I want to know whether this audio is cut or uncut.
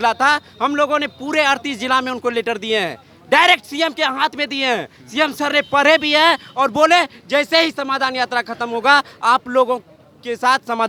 uncut